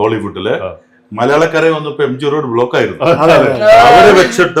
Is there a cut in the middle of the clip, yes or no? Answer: no